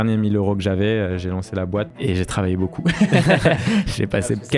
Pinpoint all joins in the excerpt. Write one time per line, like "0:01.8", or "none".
0:01.9